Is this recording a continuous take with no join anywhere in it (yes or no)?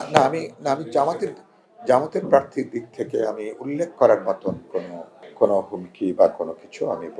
yes